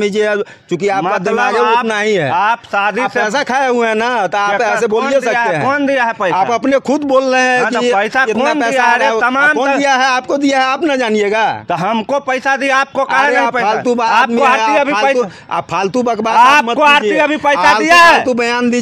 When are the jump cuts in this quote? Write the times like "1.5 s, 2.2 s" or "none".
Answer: none